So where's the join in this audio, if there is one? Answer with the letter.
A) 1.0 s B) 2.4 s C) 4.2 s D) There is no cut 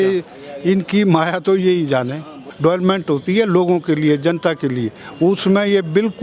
B